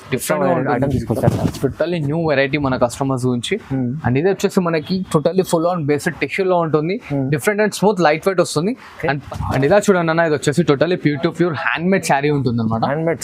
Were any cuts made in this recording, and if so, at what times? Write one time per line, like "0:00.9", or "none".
0:09.3